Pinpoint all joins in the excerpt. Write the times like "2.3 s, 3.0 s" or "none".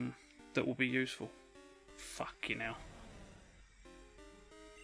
2.0 s